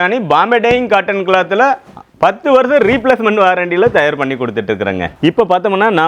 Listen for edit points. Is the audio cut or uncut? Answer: cut